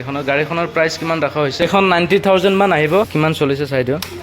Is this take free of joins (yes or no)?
no